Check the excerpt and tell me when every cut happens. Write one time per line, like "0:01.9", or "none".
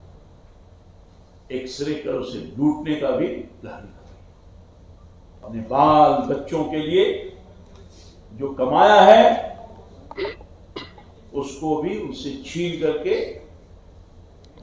0:05.4

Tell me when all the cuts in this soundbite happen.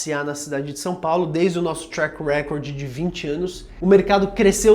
0:03.7

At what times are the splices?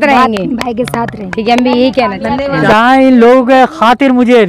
0:02.6

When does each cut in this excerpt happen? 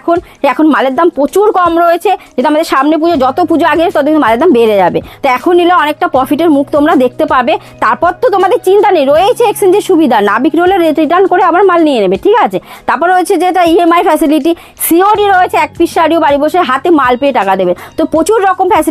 none

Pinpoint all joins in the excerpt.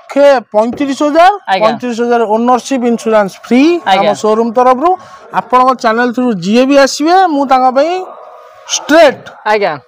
0:05.2

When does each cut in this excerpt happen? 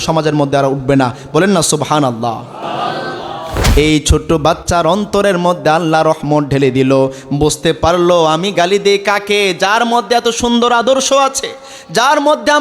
0:03.6

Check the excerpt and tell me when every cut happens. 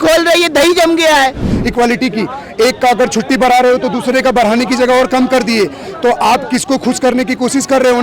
0:01.5

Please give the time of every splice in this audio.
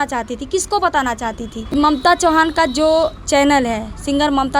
0:01.6

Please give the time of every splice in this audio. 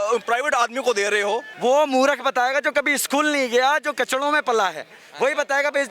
0:01.5

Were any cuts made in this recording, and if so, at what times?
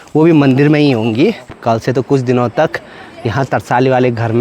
0:01.6

